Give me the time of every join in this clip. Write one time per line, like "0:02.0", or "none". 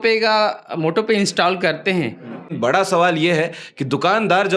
0:02.5

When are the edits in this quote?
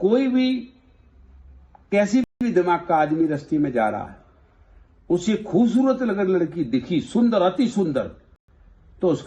none

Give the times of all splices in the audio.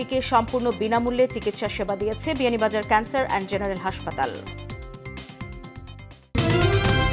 0:06.2

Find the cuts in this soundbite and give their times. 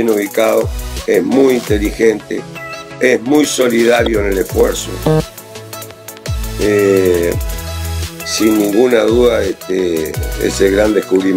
none

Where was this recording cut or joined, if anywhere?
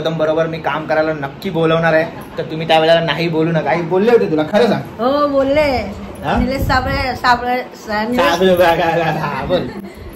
none

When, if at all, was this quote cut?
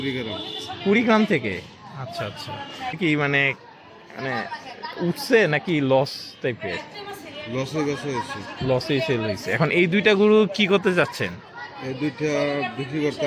0:02.9

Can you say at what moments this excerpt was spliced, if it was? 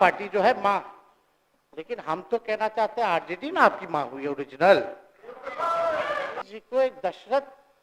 0:06.5

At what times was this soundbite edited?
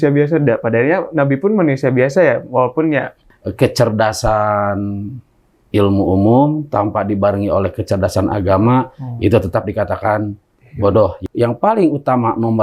0:03.2
0:11.2

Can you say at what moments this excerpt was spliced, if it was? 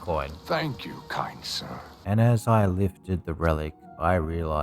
0:01.9

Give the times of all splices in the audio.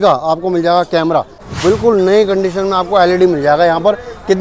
0:01.4

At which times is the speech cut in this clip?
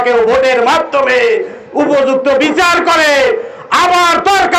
none

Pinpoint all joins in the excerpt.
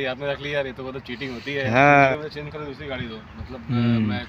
0:02.1

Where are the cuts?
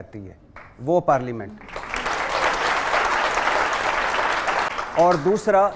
0:04.7

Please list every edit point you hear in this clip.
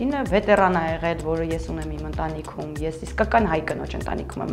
none

